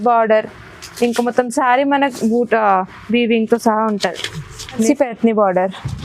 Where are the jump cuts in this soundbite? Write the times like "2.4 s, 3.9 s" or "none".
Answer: 4.9 s